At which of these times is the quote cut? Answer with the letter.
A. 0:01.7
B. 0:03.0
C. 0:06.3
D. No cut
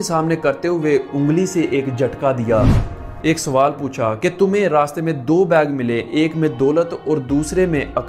B